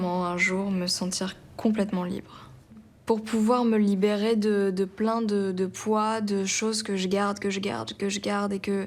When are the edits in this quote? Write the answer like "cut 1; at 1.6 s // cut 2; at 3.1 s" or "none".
none